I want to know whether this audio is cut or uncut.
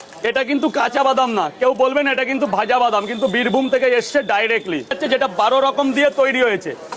cut